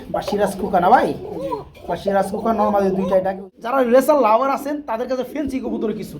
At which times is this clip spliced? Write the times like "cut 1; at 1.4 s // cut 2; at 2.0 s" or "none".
cut 1; at 4.0 s